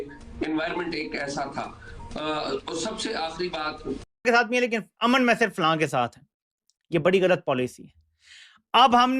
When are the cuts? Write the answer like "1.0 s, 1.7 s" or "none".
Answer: 4.0 s